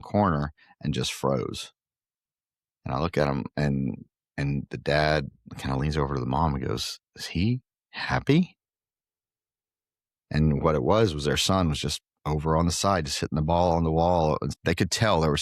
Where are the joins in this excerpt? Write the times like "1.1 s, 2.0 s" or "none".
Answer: 14.5 s